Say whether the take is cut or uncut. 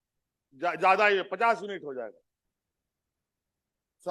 uncut